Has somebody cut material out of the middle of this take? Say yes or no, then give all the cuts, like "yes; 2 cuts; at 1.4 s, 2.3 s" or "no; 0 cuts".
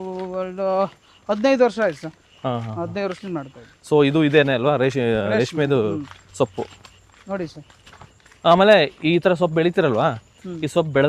no; 0 cuts